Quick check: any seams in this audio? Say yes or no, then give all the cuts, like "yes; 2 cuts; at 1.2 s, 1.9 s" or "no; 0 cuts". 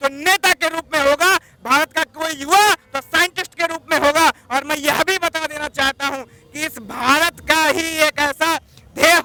no; 0 cuts